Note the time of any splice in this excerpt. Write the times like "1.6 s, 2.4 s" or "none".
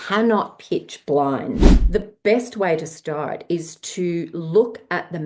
1.7 s